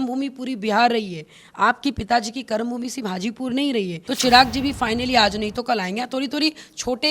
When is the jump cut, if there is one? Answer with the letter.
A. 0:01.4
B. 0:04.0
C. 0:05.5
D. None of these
B